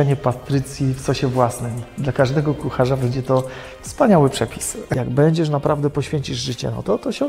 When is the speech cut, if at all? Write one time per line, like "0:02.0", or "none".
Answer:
0:04.9